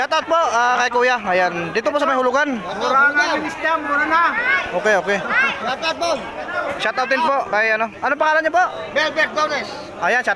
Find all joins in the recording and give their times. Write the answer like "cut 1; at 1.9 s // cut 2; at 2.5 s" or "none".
none